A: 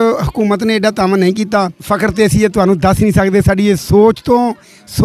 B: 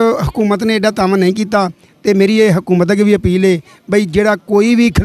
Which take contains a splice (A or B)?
A